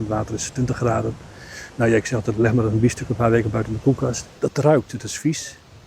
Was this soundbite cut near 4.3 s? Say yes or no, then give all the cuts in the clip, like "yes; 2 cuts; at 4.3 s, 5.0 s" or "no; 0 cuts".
yes; 1 cut; at 4.3 s